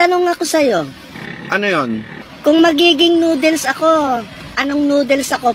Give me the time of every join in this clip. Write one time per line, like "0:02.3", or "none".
none